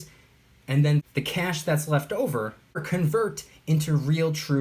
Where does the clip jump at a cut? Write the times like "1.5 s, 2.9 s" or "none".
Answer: 1.1 s, 2.8 s